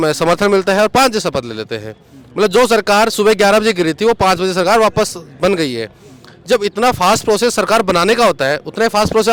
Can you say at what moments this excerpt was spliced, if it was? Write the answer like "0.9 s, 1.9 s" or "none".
none

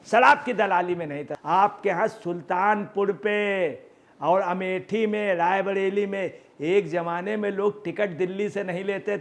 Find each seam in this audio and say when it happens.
1.3 s

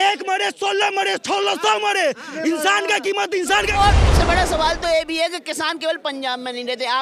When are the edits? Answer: 4.0 s

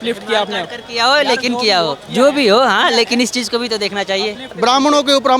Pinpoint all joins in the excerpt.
4.4 s

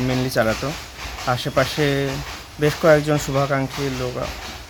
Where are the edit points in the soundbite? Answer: none

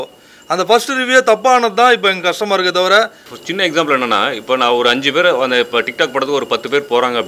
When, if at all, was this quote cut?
3.2 s

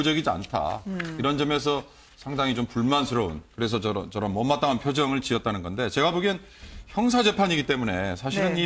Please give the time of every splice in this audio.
5.9 s

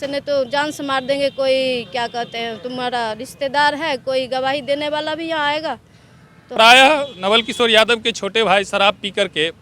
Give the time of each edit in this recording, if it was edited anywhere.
6.4 s

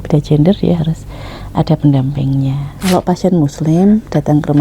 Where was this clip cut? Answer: 2.7 s

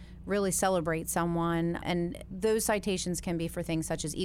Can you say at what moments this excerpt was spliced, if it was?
1.8 s

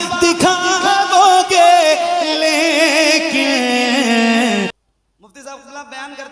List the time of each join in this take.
4.8 s

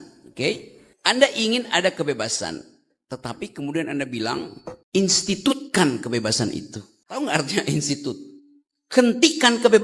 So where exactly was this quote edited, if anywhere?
none

